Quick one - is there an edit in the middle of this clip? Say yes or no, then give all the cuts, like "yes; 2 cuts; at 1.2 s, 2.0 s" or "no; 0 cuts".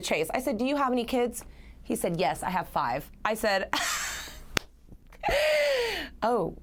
no; 0 cuts